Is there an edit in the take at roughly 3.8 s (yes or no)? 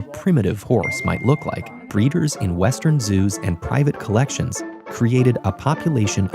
no